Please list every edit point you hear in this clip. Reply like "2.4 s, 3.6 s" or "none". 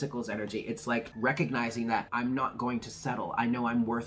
1.1 s, 2.1 s